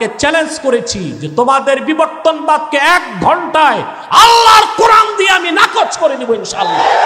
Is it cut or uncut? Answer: uncut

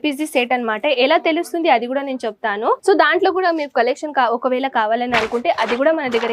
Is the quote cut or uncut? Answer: cut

